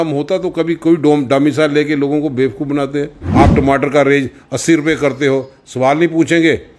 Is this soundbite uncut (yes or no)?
no